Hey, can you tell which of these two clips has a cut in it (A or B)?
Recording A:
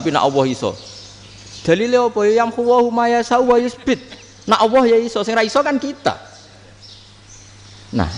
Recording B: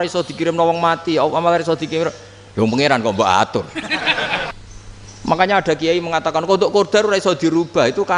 B